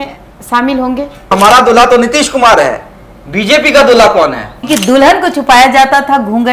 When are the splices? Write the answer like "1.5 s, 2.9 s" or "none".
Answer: 1.3 s, 4.6 s